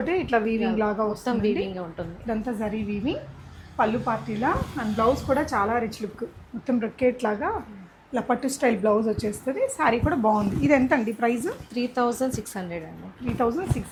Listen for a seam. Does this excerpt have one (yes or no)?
no